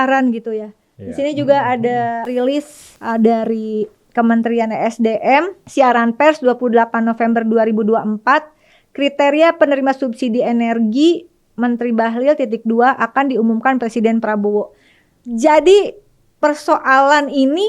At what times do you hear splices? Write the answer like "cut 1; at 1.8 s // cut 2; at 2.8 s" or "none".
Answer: cut 1; at 2.3 s // cut 2; at 5.6 s